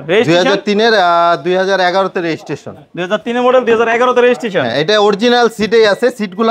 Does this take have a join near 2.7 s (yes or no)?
no